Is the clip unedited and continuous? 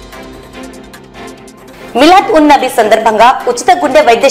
no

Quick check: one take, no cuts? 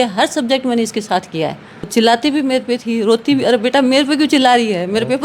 no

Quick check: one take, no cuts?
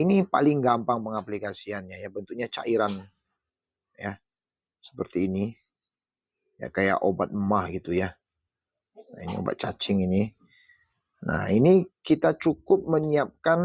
yes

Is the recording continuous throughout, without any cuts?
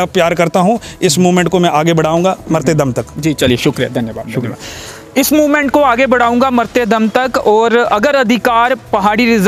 yes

